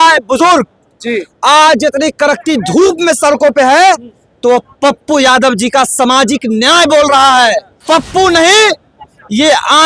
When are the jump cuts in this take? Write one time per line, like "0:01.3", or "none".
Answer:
0:07.8